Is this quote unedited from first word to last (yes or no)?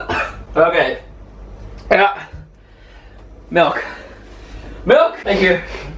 yes